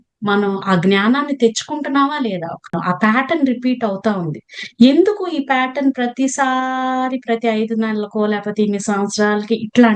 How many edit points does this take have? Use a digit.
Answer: 1